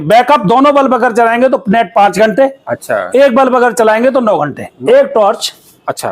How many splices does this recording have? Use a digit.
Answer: 1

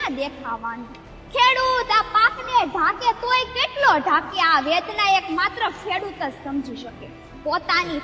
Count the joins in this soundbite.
0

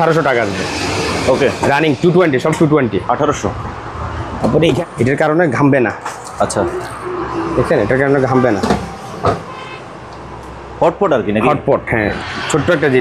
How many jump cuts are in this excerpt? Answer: 2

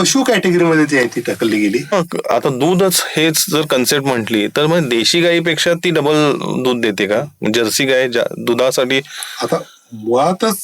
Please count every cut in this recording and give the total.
1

